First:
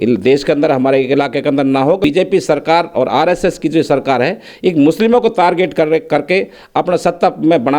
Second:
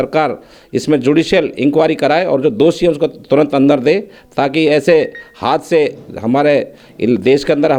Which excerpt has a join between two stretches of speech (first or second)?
first